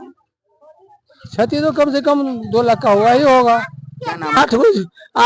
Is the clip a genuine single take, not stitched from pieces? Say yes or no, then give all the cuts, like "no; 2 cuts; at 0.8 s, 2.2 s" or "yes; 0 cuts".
no; 1 cut; at 4.4 s